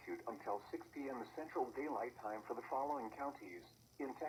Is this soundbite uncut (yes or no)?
yes